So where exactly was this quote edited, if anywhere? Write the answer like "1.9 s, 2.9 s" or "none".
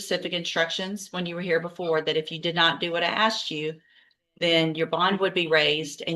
none